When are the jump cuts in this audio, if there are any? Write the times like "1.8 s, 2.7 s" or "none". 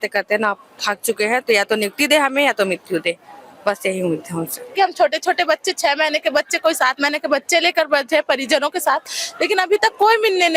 4.7 s

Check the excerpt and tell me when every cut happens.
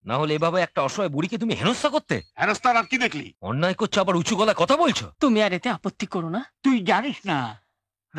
2.3 s, 3.3 s, 5.1 s

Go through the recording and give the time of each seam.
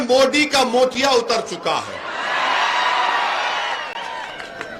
none

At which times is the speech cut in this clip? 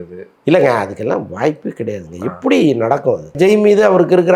3.4 s

